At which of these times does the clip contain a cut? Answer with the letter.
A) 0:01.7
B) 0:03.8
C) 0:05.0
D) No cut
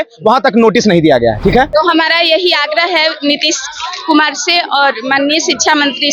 A